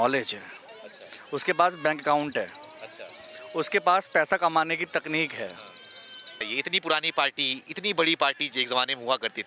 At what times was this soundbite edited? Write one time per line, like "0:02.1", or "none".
0:06.5